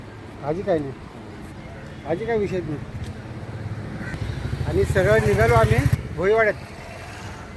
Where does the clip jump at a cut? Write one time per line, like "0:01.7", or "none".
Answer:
0:04.1
0:06.0

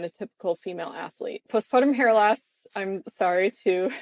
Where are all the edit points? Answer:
0:01.4

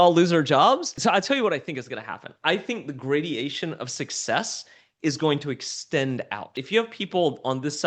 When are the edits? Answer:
0:01.0
0:06.6

